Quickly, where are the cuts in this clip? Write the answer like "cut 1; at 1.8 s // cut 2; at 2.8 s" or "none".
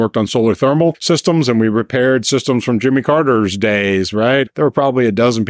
cut 1; at 1.0 s // cut 2; at 4.5 s